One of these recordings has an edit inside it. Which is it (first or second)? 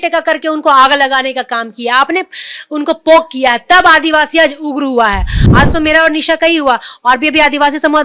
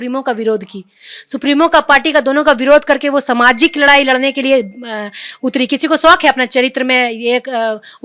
first